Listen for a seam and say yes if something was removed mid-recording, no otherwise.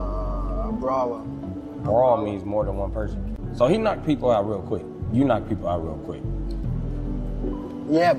no